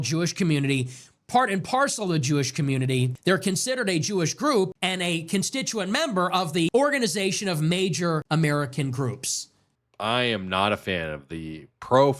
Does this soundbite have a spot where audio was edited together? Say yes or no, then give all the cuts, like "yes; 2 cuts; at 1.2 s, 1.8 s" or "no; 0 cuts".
yes; 5 cuts; at 3.1 s, 4.8 s, 6.7 s, 8.2 s, 9.5 s